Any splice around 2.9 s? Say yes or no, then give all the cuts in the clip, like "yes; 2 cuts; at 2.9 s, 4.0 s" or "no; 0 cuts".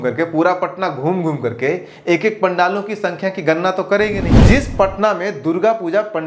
no; 1 cut; at 4.4 s